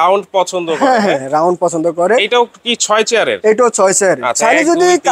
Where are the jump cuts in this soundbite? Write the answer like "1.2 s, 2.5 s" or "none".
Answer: none